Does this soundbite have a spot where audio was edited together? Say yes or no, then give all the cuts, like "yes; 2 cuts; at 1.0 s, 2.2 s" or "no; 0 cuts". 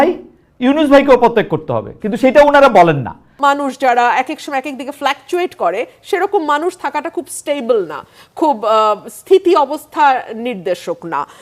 yes; 1 cut; at 3.3 s